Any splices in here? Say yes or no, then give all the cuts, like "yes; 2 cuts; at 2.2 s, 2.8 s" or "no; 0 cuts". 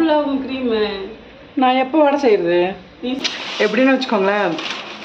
yes; 1 cut; at 3.3 s